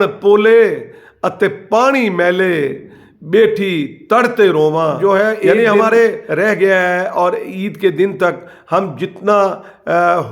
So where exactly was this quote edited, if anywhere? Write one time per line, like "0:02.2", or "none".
0:06.2